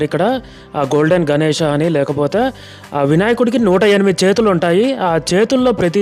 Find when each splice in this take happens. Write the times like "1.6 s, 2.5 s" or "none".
none